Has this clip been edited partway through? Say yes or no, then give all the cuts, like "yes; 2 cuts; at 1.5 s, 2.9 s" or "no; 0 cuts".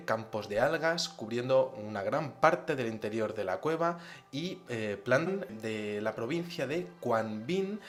no; 0 cuts